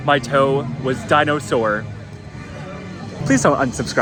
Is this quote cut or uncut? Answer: uncut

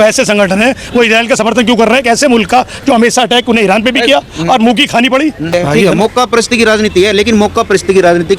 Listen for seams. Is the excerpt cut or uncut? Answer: cut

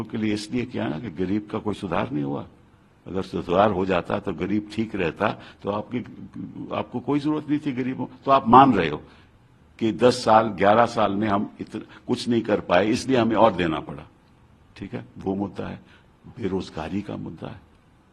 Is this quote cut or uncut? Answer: uncut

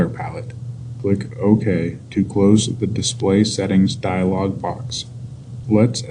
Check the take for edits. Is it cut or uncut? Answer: uncut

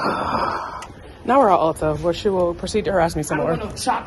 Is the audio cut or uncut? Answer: uncut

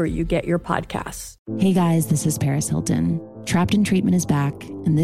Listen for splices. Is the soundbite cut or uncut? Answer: cut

